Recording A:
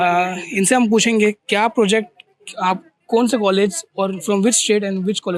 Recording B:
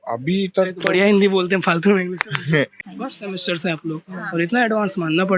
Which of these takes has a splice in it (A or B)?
B